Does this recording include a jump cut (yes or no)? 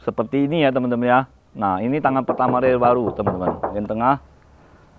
yes